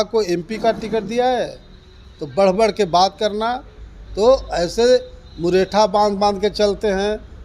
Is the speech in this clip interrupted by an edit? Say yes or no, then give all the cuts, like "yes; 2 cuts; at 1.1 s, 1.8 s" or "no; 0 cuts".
no; 0 cuts